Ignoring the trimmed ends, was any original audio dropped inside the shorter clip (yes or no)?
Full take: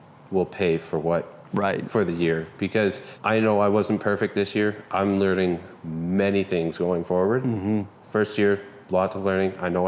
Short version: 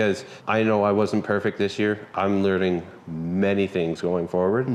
no